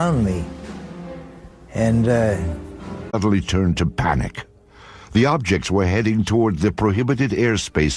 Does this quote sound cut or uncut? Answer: uncut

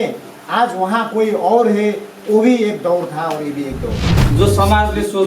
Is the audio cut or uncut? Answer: cut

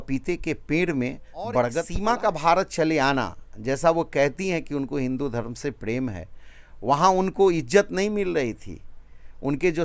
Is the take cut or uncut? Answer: cut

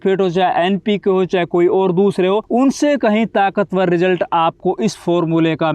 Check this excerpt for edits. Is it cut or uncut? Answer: uncut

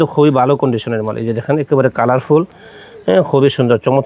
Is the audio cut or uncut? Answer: uncut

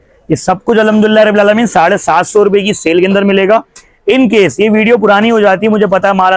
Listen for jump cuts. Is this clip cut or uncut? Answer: uncut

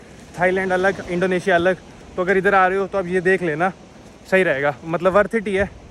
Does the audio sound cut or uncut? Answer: uncut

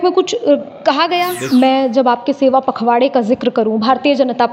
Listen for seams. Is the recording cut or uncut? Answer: cut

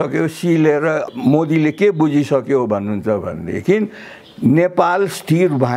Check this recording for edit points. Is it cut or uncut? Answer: cut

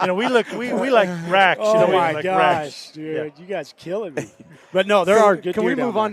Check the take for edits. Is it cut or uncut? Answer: uncut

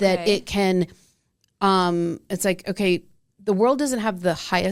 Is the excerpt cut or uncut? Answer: uncut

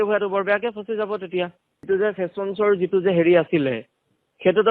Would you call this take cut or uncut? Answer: cut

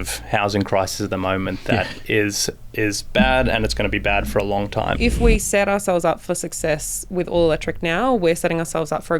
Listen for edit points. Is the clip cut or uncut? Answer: cut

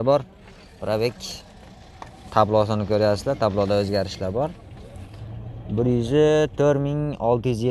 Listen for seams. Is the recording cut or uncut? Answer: uncut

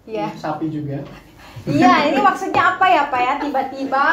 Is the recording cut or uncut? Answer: uncut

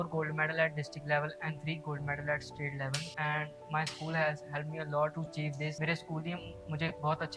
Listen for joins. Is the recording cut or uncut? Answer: cut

